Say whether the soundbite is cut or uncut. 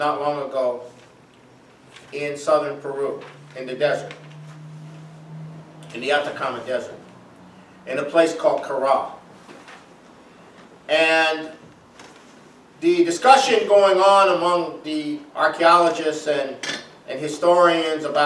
cut